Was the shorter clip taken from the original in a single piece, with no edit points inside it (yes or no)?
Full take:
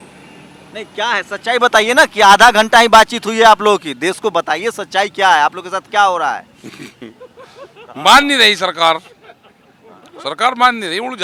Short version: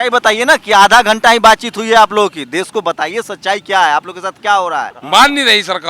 no